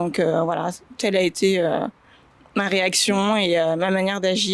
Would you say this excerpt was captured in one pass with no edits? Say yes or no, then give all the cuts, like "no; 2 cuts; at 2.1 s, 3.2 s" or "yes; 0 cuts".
yes; 0 cuts